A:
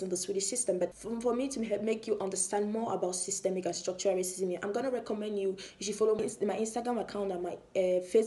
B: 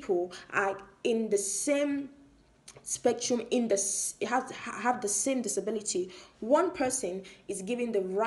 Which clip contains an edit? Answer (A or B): A